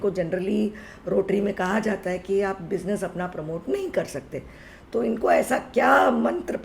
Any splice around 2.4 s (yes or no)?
no